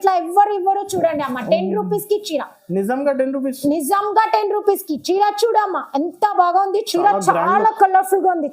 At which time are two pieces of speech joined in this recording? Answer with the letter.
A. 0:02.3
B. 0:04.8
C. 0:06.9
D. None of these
C